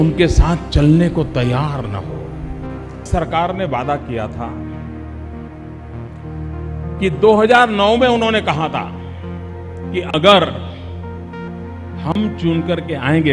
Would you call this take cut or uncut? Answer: cut